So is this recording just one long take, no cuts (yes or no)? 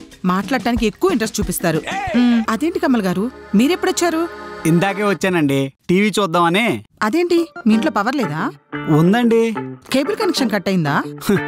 no